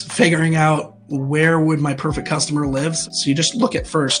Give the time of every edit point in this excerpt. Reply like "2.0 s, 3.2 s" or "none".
3.0 s